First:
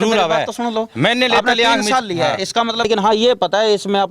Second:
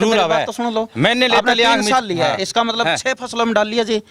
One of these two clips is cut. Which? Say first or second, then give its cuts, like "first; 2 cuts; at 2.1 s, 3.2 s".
first; 1 cut; at 2.9 s